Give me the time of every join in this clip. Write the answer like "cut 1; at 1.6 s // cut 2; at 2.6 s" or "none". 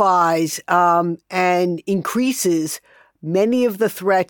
none